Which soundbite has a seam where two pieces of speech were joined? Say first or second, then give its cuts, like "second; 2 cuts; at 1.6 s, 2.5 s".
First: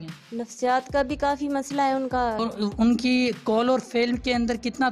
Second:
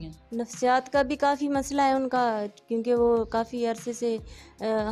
first; 1 cut; at 2.4 s